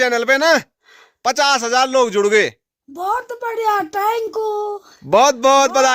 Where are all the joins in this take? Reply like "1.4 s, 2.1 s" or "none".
none